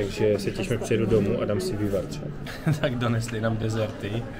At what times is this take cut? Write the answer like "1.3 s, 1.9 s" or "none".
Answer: 2.4 s